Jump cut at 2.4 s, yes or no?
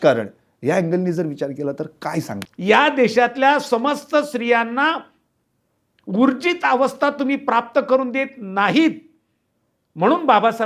yes